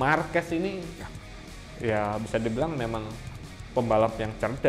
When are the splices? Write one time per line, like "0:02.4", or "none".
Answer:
none